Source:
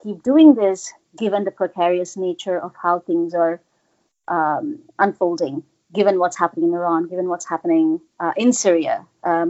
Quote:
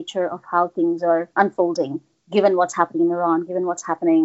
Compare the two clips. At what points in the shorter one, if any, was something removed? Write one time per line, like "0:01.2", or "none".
0:01.3